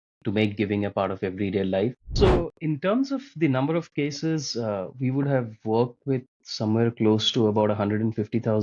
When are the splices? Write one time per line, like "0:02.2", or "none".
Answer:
0:02.0